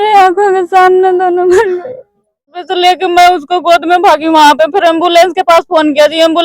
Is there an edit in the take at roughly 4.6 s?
no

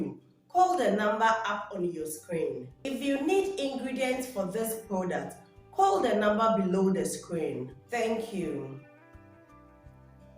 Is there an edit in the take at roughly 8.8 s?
yes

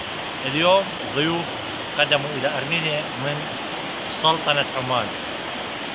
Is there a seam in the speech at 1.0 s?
yes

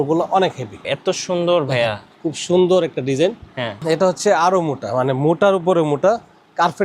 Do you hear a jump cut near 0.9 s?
yes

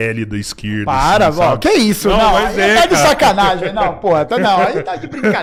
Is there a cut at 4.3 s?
no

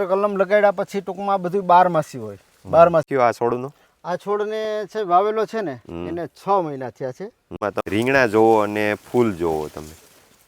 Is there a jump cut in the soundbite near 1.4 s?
no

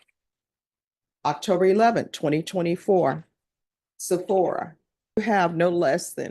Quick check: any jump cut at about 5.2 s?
yes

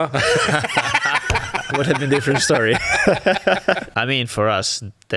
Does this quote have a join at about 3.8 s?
yes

